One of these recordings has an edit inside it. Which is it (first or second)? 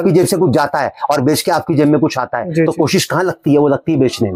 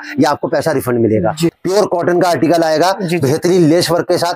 second